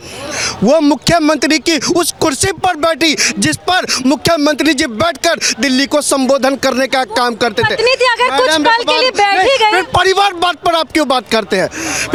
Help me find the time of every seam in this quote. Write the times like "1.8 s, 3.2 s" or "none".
none